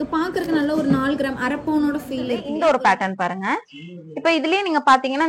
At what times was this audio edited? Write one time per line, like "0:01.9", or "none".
0:02.5